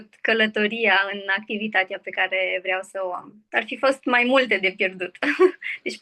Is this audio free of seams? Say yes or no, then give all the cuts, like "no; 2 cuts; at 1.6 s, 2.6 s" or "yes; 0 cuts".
no; 1 cut; at 3.3 s